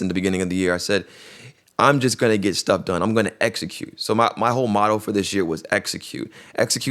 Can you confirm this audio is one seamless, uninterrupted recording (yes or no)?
yes